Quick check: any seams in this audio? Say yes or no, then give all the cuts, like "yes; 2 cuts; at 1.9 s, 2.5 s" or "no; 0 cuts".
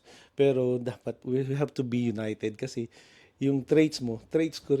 yes; 1 cut; at 1.2 s